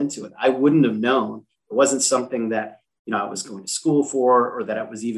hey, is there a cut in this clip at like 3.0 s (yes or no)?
no